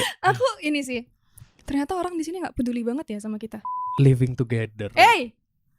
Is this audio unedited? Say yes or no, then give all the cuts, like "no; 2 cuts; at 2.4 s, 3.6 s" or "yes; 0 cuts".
no; 1 cut; at 3.8 s